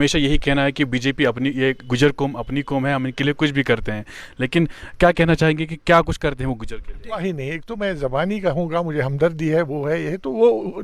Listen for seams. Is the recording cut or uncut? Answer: cut